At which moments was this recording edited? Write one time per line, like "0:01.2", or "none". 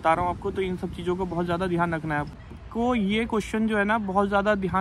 0:02.5